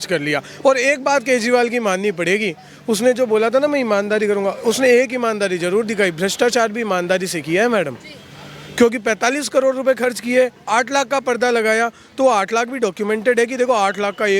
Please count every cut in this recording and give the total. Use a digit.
0